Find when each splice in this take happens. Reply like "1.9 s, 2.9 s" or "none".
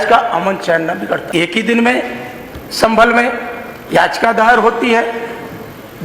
1.2 s